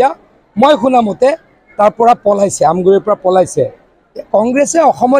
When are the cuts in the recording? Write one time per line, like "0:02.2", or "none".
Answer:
none